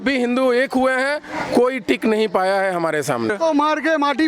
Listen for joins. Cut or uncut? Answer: cut